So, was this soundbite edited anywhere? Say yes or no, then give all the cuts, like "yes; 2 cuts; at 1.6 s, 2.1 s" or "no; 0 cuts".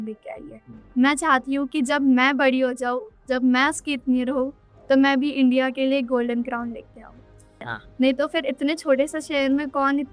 yes; 1 cut; at 7.7 s